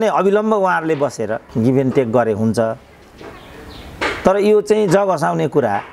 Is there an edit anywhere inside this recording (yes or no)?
no